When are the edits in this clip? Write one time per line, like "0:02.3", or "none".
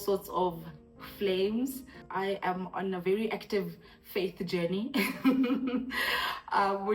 0:02.0